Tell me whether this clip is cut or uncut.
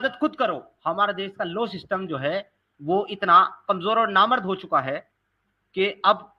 cut